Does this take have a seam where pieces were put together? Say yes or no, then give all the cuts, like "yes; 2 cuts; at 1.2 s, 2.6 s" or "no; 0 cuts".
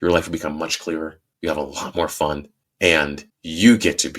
yes; 2 cuts; at 1.2 s, 2.8 s